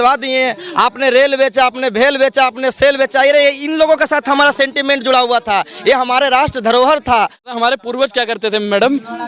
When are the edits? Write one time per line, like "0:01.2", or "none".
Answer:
0:07.4